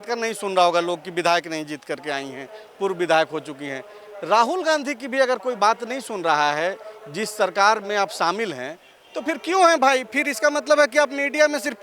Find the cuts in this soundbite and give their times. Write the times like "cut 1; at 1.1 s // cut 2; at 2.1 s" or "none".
none